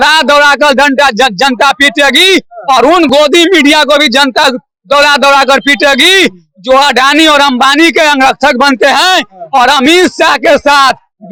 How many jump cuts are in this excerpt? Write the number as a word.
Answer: zero